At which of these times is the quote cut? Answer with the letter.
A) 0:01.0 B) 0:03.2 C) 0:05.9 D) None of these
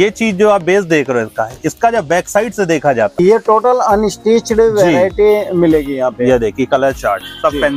B